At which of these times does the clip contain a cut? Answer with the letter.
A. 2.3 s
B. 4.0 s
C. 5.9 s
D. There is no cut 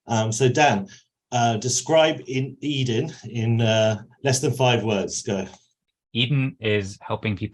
C